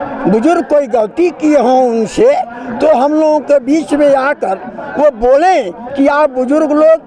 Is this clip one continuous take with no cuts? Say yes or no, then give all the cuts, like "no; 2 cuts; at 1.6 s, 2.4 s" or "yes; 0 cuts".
yes; 0 cuts